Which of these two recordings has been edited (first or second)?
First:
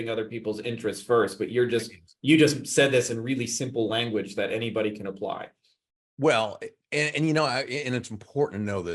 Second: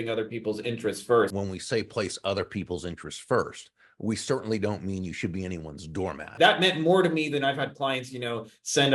second